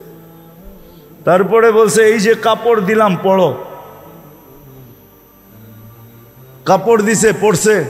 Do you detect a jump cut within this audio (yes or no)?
no